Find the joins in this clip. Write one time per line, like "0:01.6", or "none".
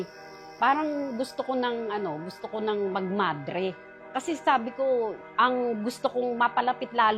0:03.9